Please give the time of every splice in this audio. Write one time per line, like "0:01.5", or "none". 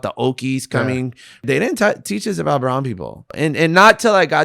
0:01.4
0:03.3